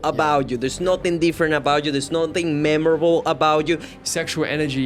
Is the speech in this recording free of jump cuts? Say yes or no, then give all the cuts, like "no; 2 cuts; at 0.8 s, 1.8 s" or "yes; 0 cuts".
no; 1 cut; at 3.9 s